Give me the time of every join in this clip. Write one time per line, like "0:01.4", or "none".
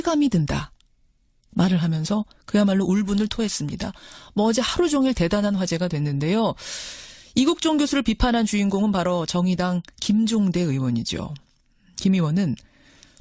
0:04.7

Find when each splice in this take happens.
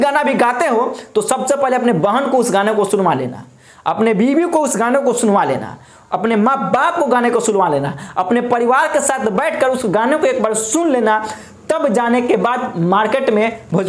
none

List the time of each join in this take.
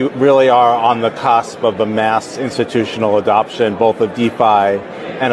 none

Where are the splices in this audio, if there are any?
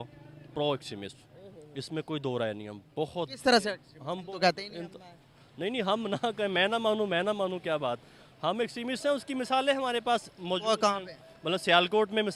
none

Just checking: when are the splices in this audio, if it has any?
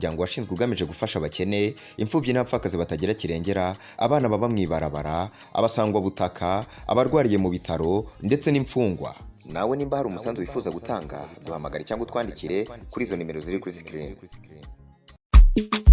none

